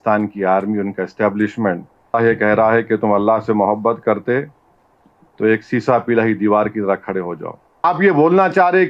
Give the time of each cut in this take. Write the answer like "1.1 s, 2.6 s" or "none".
2.1 s, 7.8 s